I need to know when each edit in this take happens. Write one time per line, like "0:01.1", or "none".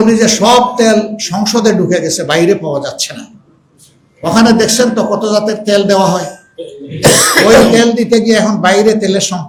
none